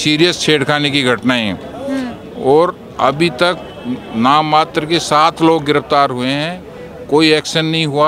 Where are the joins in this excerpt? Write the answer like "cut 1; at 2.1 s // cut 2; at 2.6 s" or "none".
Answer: none